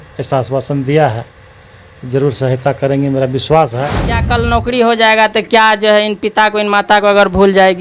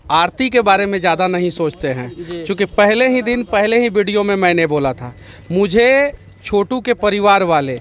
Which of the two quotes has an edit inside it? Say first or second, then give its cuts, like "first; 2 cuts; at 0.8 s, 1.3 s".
first; 1 cut; at 4.2 s